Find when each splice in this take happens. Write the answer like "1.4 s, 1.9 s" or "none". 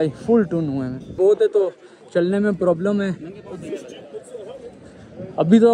1.1 s

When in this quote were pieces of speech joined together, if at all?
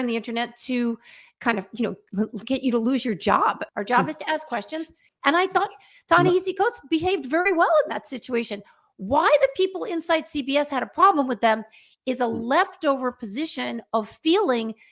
3.6 s, 5.1 s

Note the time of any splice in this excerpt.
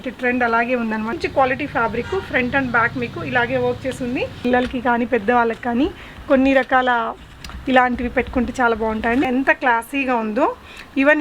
1.2 s, 4.4 s, 9.3 s

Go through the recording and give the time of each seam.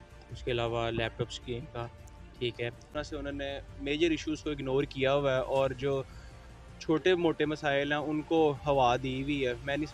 2.9 s

